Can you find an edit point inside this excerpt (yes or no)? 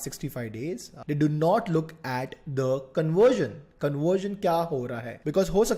yes